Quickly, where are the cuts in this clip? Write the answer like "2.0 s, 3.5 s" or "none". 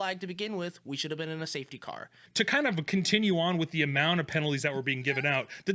2.3 s